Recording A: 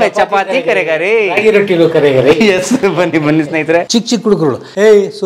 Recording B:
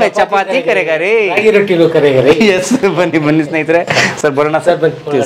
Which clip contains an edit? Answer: A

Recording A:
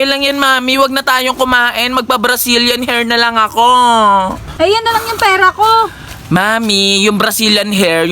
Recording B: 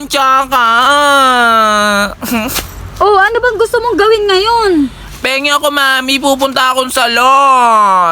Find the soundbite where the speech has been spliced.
A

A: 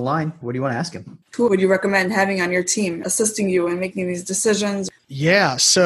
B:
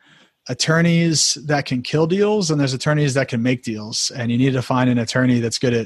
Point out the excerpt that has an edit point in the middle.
A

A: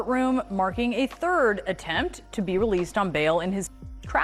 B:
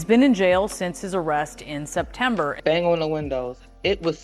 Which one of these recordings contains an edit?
B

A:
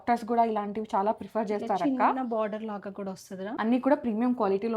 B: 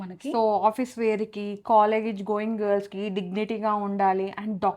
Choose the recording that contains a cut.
A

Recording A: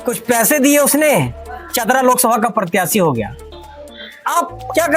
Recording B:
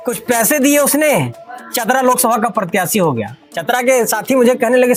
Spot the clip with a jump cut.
A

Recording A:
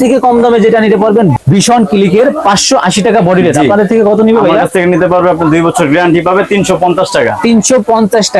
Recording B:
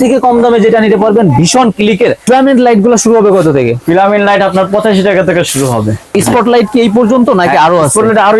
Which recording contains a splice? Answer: B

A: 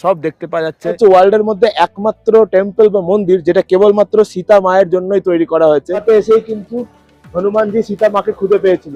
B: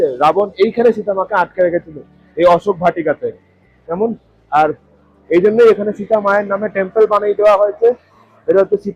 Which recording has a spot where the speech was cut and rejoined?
A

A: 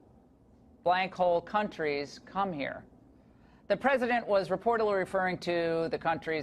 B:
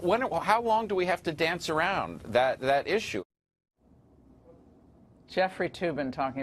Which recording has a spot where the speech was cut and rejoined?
B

